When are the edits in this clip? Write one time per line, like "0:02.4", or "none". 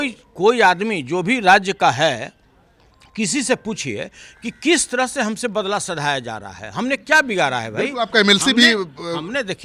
none